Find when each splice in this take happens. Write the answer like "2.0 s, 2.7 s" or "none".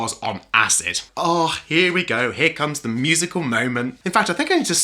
1.0 s, 4.0 s